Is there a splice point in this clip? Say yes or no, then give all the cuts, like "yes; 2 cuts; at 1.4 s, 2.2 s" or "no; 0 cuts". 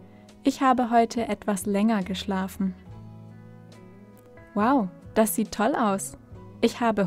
no; 0 cuts